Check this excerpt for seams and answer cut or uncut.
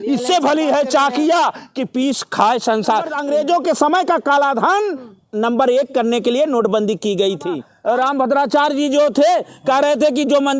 cut